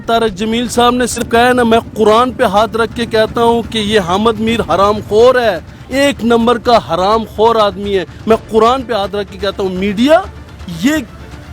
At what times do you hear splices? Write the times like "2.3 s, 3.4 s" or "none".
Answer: 1.2 s